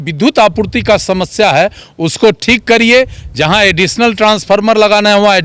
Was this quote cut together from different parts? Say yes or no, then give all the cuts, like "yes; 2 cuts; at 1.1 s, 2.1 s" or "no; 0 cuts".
no; 0 cuts